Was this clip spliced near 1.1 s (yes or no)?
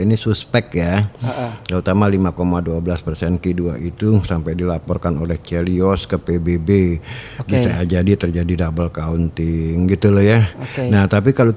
no